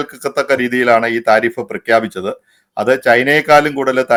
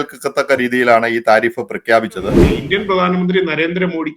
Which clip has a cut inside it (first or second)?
second